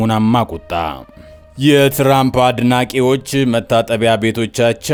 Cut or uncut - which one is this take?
uncut